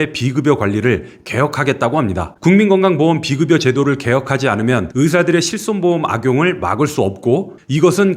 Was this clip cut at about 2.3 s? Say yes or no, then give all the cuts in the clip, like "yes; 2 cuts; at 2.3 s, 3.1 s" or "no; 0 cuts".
yes; 1 cut; at 2.3 s